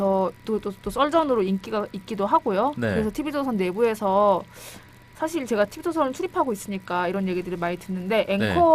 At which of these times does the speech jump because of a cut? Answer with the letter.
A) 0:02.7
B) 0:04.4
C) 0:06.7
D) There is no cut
C